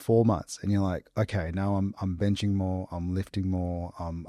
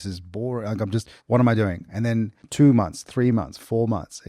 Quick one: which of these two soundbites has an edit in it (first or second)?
second